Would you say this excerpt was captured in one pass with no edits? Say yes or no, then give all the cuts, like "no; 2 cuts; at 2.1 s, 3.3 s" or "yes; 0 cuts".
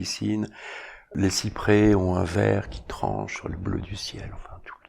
no; 1 cut; at 1.1 s